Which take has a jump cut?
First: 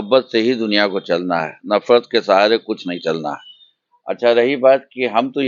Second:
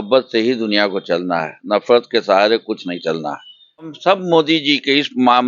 second; 1 cut; at 3.9 s

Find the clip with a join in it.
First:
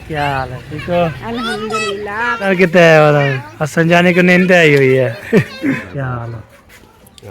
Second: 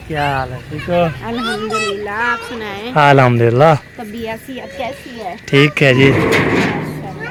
first; 2 cuts; at 2.5 s, 5.9 s

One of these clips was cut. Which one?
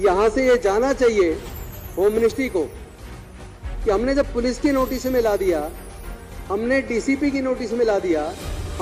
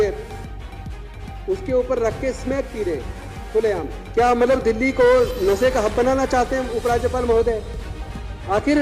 second; 1 cut; at 4.0 s

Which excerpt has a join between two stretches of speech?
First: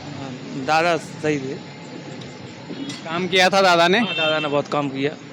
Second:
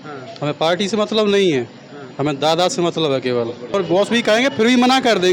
second; 1 cut; at 3.8 s

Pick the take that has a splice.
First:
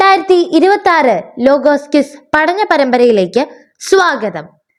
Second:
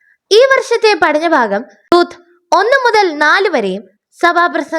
second; 1 cut; at 1.9 s

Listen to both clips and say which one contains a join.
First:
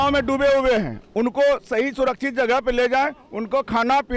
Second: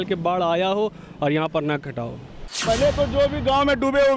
second; 1 cut; at 2.5 s

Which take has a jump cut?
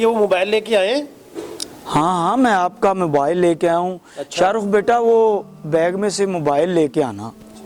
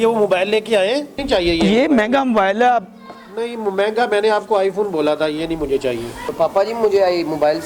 second; 2 cuts; at 1.2 s, 6.3 s

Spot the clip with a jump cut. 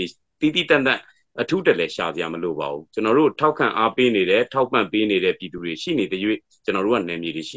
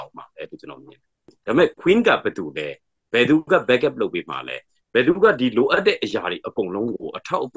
second; 1 cut; at 1.3 s

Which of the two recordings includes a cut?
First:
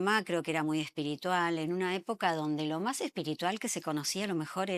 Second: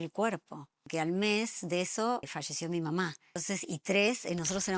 second; 3 cuts; at 0.9 s, 2.3 s, 3.4 s

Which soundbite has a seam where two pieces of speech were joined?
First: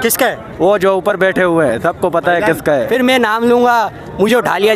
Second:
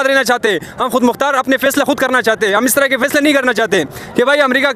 first; 1 cut; at 2.9 s

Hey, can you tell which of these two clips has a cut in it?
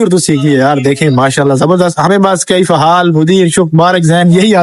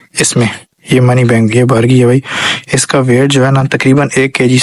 first; 1 cut; at 2.1 s

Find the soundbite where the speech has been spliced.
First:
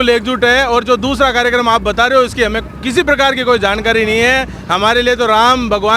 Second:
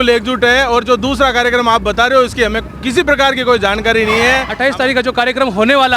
second; 1 cut; at 4.5 s

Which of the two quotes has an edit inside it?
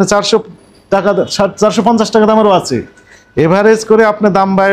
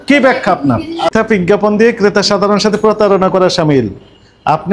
second; 1 cut; at 1.1 s

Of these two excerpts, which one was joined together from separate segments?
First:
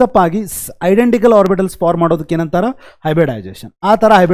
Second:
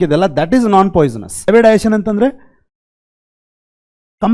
second; 1 cut; at 1.3 s

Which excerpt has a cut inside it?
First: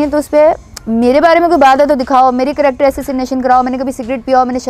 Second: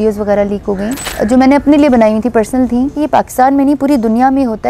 second; 2 cuts; at 1.0 s, 3.0 s

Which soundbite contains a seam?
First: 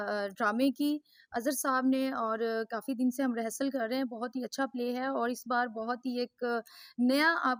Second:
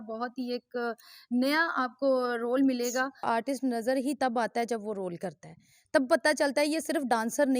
second; 1 cut; at 3.2 s

